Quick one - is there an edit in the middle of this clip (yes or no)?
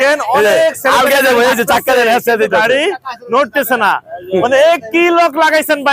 no